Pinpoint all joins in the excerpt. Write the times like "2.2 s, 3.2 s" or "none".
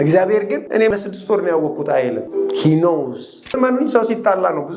0.9 s, 2.2 s, 3.5 s